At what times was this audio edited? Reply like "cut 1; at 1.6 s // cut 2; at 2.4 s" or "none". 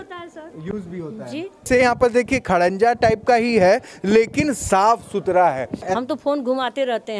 cut 1; at 1.7 s // cut 2; at 5.8 s